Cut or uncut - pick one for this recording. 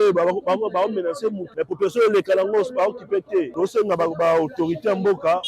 cut